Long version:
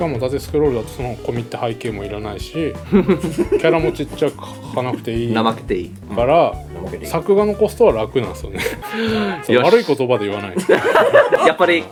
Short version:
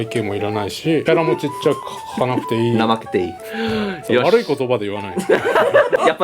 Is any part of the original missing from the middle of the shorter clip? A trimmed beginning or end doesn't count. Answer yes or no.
yes